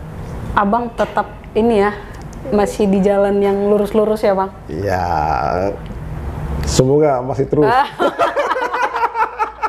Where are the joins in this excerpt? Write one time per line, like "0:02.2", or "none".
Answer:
none